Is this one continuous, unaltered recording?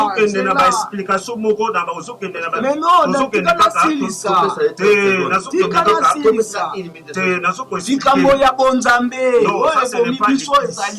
yes; 0 cuts

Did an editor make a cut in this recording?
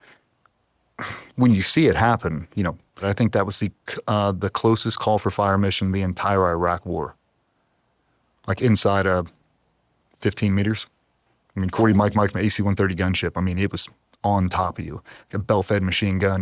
yes; 1 cut; at 3.0 s

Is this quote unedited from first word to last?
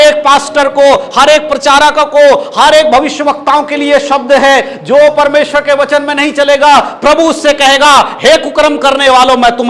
yes; 0 cuts

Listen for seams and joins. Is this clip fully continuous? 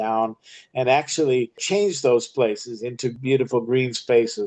no; 2 cuts; at 1.6 s, 3.2 s

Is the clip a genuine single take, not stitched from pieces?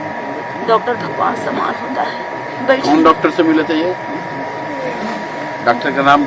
no; 1 cut; at 2.5 s

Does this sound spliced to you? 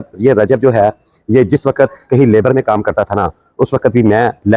no; 0 cuts

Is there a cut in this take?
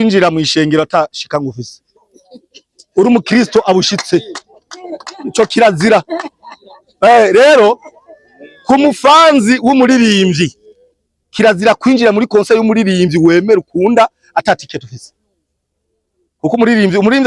no; 0 cuts

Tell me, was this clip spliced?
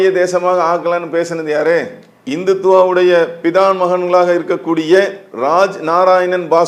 no; 0 cuts

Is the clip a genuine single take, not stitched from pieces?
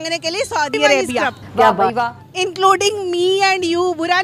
no; 1 cut; at 1.9 s

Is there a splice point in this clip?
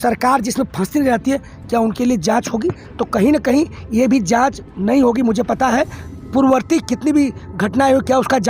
no; 0 cuts

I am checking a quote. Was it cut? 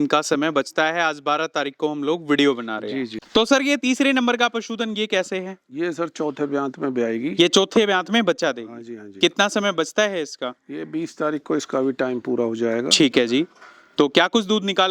yes; 1 cut; at 3.1 s

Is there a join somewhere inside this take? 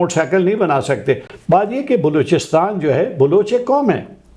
yes; 1 cut; at 1.3 s

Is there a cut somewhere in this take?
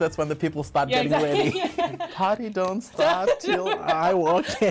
no; 0 cuts

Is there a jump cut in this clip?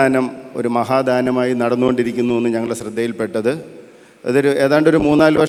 no; 0 cuts

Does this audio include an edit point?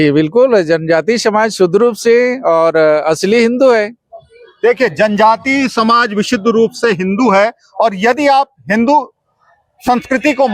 no; 0 cuts

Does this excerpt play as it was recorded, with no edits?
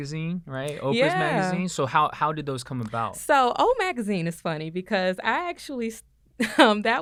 yes; 0 cuts

